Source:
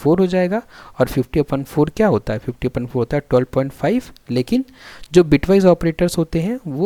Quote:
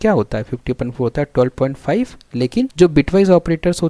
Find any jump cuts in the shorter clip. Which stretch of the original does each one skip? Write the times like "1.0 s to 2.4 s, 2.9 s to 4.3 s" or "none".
4.7 s to 5.1 s